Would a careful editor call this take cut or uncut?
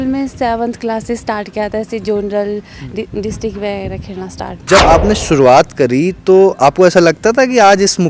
cut